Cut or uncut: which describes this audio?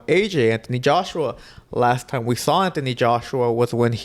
uncut